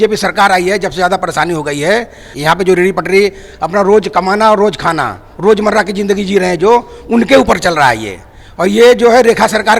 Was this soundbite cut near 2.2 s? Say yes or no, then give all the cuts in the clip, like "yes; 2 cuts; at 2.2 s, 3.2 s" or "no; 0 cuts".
yes; 1 cut; at 2.2 s